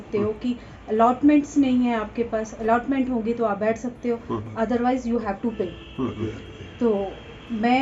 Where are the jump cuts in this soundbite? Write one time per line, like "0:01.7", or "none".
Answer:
none